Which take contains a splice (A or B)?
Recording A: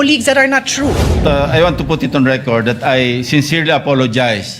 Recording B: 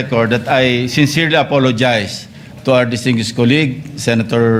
A